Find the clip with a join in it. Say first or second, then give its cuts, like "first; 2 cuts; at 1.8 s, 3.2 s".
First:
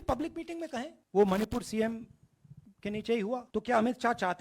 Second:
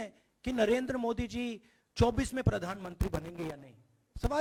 first; 2 cuts; at 1.0 s, 3.5 s